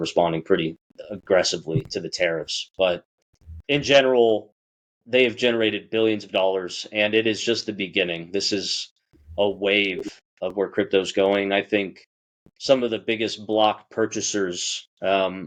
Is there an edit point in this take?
no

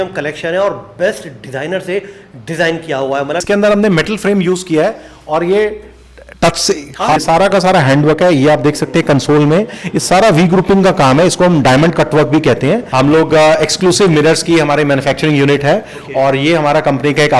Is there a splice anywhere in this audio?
yes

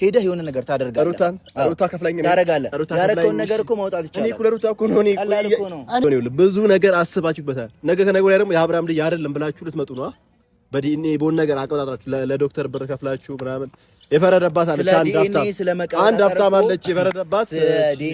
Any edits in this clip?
yes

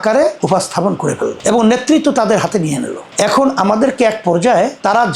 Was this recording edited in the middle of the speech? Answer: no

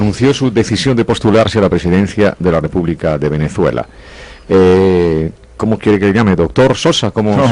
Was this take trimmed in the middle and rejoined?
no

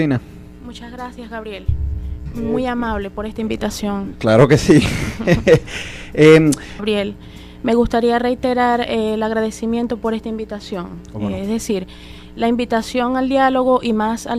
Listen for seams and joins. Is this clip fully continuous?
yes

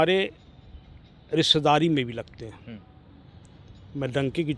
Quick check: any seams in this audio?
no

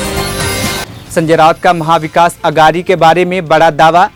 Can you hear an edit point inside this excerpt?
no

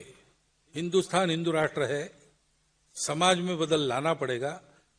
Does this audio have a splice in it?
no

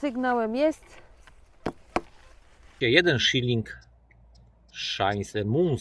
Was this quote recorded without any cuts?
no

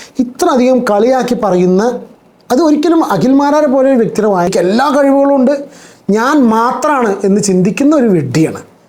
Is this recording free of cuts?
no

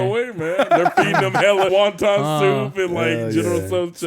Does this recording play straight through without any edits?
no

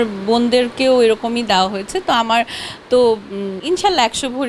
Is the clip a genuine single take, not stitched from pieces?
no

